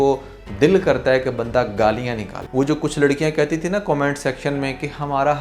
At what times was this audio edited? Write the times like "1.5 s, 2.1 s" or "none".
2.3 s